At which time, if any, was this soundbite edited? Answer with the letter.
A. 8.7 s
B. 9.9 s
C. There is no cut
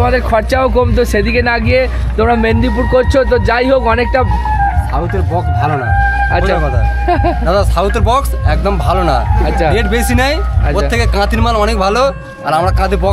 C